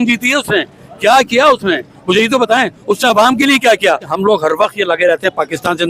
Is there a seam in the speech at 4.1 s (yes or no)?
yes